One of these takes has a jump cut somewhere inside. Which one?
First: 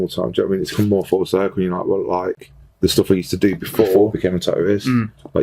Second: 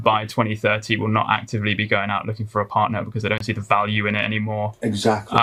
first; 1 cut; at 4.1 s

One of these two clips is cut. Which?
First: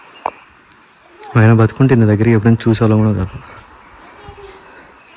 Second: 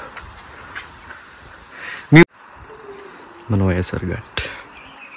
second; 1 cut; at 2.2 s

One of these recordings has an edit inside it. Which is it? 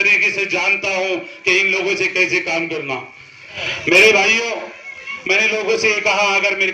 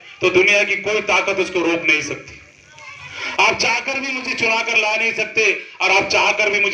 first; 1 cut; at 3.6 s

